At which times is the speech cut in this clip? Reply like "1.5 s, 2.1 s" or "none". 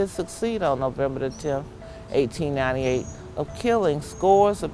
none